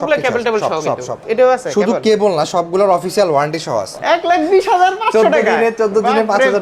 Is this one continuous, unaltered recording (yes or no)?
no